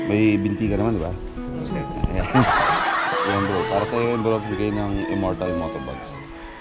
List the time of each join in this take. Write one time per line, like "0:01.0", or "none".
0:03.1